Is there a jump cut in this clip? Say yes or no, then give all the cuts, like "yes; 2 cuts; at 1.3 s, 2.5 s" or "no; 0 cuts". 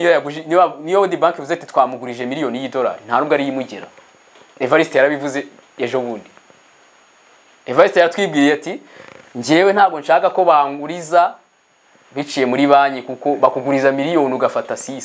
no; 0 cuts